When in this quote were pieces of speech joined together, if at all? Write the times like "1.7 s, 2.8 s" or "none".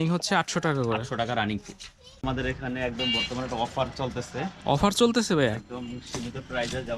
2.2 s